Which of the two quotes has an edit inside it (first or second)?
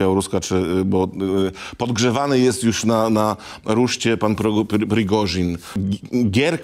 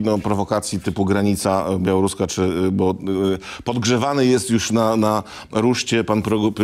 first